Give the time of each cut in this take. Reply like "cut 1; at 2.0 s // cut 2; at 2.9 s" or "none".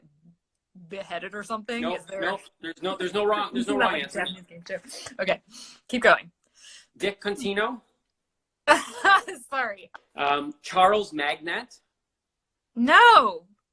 cut 1; at 10.0 s